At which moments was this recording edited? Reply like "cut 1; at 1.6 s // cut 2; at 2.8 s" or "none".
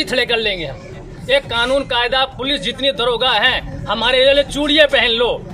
cut 1; at 1.1 s